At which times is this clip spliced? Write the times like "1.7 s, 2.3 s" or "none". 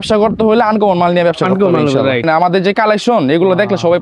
2.2 s